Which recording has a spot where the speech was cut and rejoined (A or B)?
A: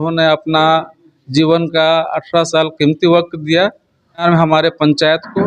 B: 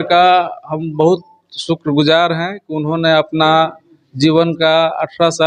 A